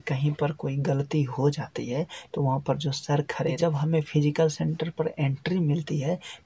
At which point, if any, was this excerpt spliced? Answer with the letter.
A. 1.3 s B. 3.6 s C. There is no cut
B